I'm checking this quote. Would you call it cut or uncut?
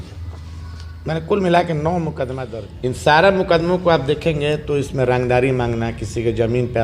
cut